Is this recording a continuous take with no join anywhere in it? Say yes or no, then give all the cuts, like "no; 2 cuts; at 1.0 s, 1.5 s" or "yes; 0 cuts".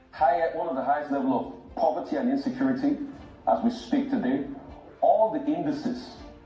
yes; 0 cuts